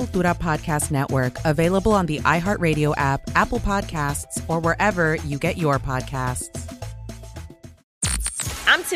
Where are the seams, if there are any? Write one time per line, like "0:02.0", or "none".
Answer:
0:07.9

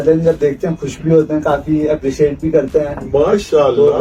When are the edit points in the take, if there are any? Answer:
none

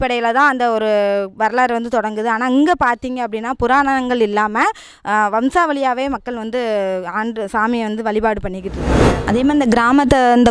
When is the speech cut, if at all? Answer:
0:09.1

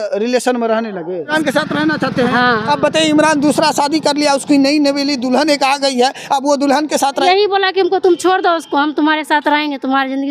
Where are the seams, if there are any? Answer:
0:01.3
0:07.2

